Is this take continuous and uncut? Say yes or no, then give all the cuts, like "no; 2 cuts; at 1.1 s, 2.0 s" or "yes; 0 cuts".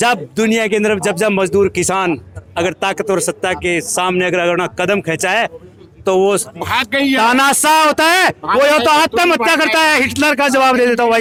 yes; 0 cuts